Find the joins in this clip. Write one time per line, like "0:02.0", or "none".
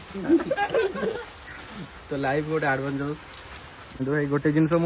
0:03.9